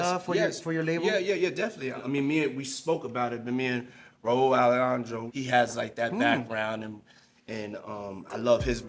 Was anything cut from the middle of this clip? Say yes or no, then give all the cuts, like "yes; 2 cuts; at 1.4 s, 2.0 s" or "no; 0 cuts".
yes; 2 cuts; at 2.0 s, 5.2 s